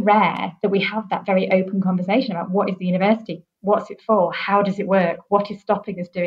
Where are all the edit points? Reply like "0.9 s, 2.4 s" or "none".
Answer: none